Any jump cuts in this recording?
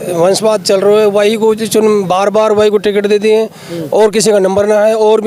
no; 0 cuts

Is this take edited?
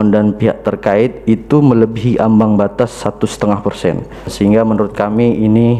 yes; 1 cut; at 4.3 s

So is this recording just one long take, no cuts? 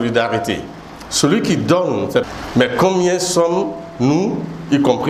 no; 1 cut; at 2.2 s

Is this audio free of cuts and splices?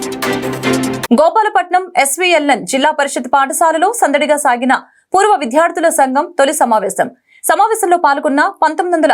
no; 1 cut; at 1.0 s

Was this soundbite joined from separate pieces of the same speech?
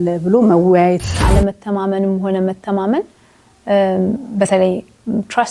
yes; 1 cut; at 1.1 s

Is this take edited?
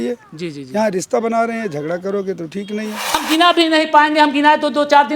yes; 1 cut; at 3.2 s

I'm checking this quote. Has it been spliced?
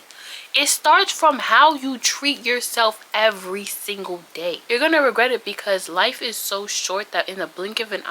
yes; 1 cut; at 4.6 s

